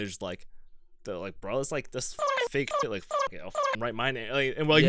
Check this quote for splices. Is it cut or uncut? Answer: uncut